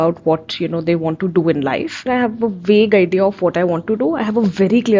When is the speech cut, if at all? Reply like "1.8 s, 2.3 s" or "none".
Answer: 2.0 s